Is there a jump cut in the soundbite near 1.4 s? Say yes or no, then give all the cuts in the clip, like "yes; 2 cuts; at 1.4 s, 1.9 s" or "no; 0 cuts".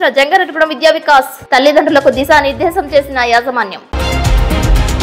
no; 1 cut; at 3.8 s